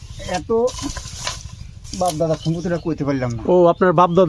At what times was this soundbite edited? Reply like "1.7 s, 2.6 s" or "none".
none